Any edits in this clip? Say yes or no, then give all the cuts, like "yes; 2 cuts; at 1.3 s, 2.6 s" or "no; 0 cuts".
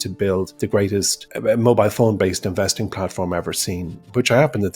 yes; 1 cut; at 1.0 s